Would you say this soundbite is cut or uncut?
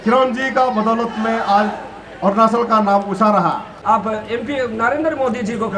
cut